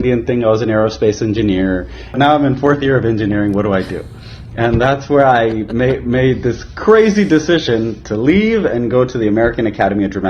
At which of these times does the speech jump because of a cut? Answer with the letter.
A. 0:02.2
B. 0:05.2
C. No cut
A